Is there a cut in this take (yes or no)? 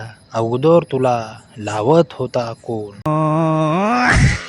yes